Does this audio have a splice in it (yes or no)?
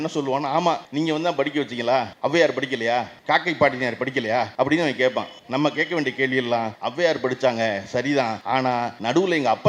yes